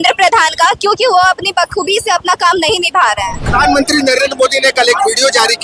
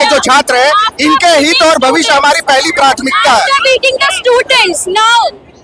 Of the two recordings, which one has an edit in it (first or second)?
first